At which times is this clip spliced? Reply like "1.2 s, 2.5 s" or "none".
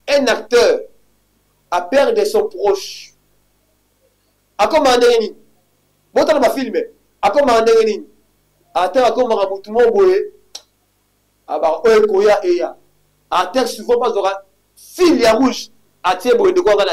none